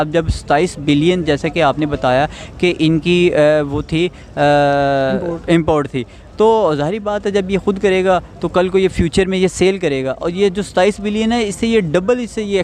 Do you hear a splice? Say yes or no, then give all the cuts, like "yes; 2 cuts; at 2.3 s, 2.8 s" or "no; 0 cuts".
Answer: no; 0 cuts